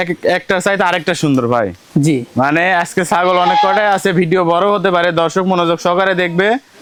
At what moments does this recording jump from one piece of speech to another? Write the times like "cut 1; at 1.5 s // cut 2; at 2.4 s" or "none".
none